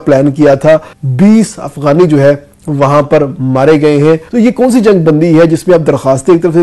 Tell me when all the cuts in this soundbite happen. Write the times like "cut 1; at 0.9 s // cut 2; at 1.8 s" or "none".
cut 1; at 1.0 s // cut 2; at 4.3 s